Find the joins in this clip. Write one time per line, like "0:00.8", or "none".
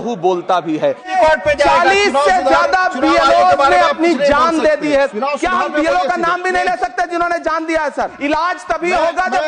0:01.1
0:05.1
0:08.1